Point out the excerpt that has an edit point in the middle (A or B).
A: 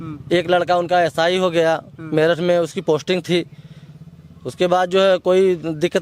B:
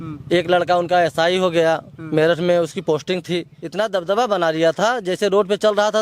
B